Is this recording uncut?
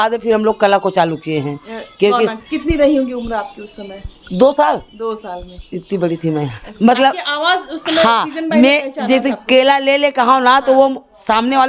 no; 2 cuts; at 2.4 s, 6.6 s

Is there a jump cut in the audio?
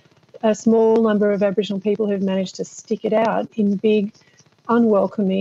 no; 0 cuts

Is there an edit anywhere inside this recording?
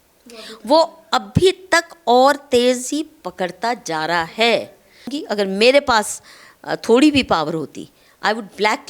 yes; 1 cut; at 5.2 s

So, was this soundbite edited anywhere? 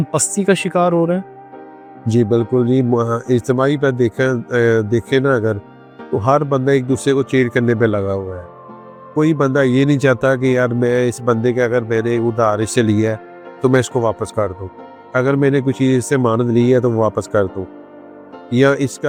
no; 0 cuts

